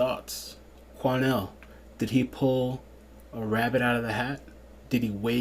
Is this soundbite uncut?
yes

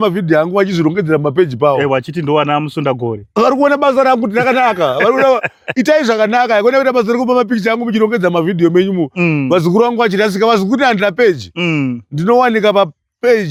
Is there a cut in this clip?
no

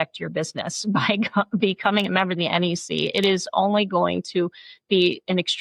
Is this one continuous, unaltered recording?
yes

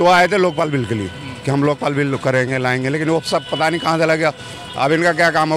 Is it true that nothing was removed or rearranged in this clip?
yes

